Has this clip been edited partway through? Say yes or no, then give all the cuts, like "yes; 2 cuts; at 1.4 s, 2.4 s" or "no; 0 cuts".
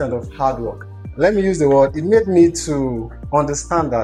no; 0 cuts